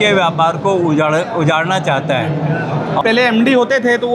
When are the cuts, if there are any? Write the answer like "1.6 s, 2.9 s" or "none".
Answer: 3.0 s